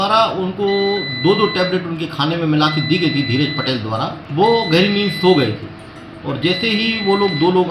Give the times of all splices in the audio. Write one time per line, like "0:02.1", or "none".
0:04.2